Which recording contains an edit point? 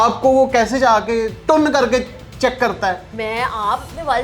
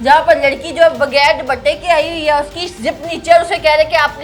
first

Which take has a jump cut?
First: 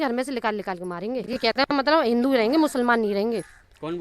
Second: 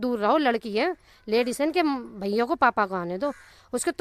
first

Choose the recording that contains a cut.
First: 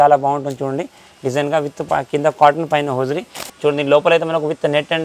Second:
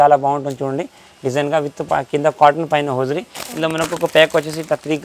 first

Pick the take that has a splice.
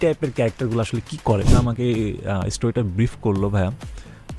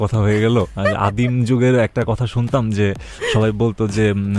first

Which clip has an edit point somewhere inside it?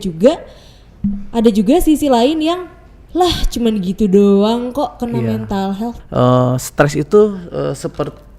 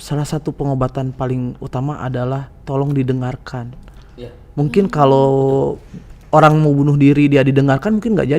first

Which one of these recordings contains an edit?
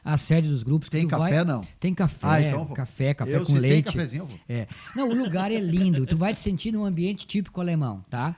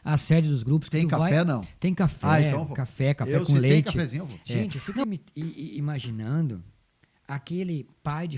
second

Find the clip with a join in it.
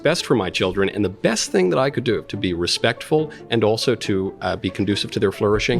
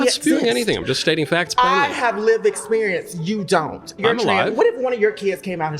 second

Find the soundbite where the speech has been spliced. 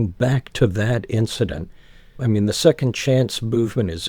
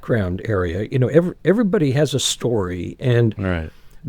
first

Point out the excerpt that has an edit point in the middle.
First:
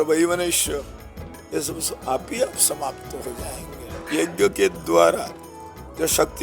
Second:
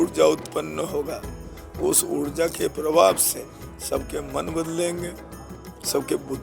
first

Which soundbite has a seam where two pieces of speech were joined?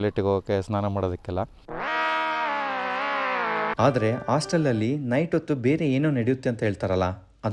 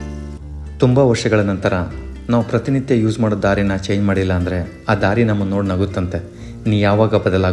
first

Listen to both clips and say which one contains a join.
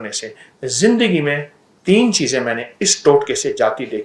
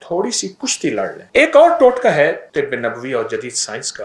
second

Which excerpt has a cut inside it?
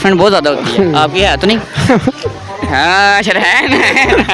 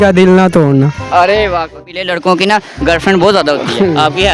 second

